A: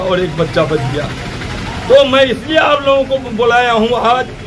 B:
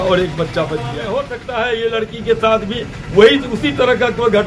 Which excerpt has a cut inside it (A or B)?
B